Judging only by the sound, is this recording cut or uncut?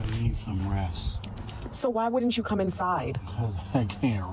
uncut